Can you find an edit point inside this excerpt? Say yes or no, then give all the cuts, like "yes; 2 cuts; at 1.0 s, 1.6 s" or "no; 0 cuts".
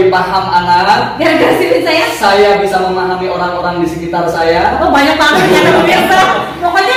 no; 0 cuts